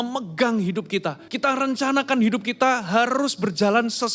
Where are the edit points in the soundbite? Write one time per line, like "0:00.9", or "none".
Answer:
0:01.2